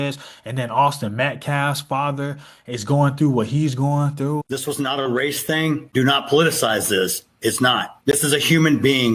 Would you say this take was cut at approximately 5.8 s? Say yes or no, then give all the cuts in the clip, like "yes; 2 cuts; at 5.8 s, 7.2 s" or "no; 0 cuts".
yes; 2 cuts; at 4.4 s, 5.8 s